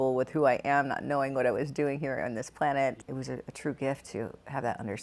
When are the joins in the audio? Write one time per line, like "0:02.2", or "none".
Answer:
0:02.9